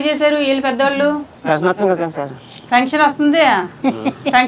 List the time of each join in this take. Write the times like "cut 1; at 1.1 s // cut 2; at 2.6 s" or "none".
cut 1; at 1.4 s